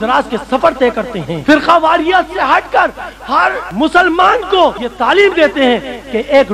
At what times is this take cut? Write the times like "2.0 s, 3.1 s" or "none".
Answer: 1.3 s, 3.6 s, 4.9 s